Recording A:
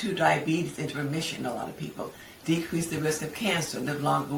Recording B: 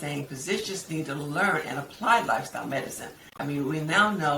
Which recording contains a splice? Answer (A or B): B